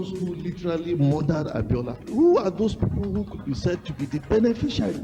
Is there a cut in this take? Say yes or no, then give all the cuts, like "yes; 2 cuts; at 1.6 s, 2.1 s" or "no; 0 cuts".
no; 0 cuts